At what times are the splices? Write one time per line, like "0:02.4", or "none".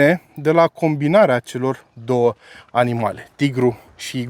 none

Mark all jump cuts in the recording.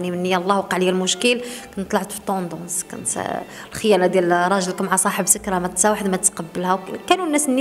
none

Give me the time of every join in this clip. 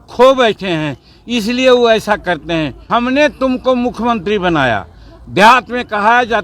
0:02.8

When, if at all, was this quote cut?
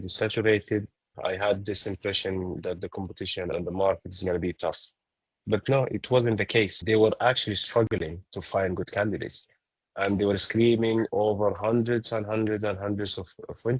0:01.1
0:03.5
0:06.8

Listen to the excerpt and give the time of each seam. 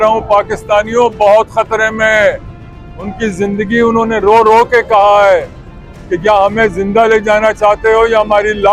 none

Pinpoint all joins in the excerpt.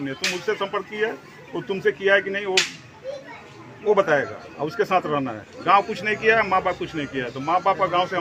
none

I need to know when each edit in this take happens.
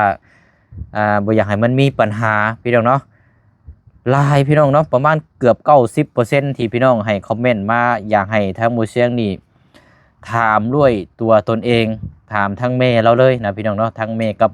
none

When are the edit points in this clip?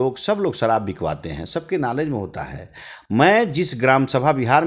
none

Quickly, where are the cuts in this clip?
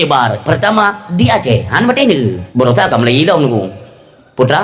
0:02.4

